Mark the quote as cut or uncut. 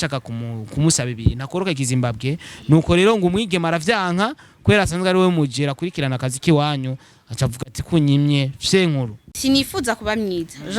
cut